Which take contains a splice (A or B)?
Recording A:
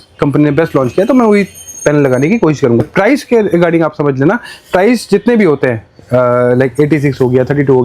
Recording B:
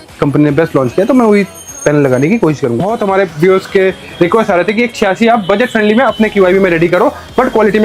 B